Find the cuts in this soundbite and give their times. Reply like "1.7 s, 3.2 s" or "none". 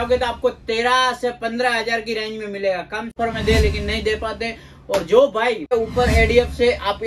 3.1 s, 5.7 s